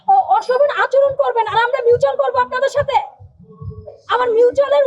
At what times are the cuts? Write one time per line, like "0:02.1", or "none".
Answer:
none